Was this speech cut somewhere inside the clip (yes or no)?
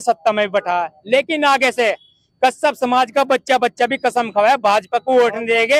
no